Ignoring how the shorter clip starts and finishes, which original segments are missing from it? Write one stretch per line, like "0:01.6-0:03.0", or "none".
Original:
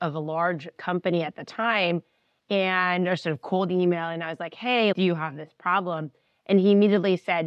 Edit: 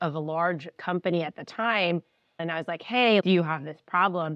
0:02.4-0:04.1